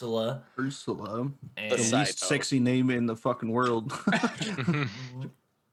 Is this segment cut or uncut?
uncut